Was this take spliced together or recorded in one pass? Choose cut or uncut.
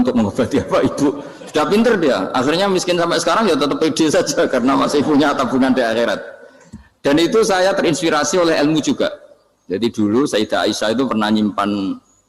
uncut